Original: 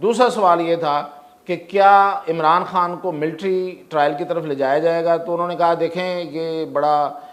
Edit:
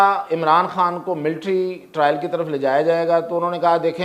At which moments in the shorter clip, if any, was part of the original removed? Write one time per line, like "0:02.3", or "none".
none